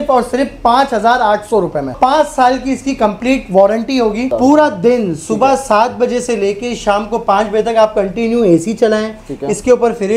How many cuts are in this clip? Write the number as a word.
two